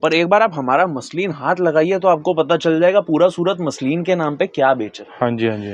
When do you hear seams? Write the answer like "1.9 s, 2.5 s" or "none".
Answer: none

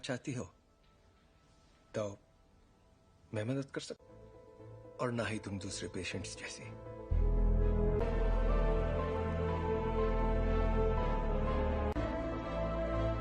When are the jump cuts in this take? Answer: 8.0 s

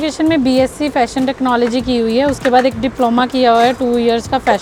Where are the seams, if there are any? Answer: none

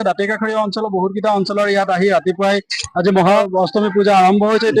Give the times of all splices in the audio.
3.4 s

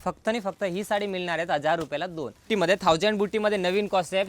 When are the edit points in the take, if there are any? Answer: 2.5 s

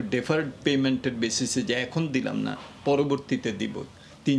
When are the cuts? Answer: none

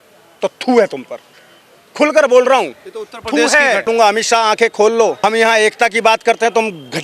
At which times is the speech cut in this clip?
3.9 s, 5.2 s

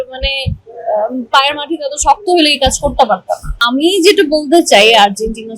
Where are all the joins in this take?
3.6 s

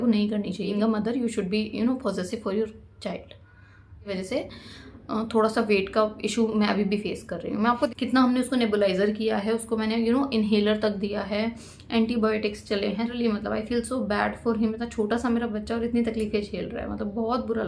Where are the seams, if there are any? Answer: 0.7 s, 4.1 s, 7.9 s, 13.1 s

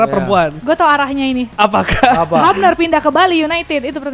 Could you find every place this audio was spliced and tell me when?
none

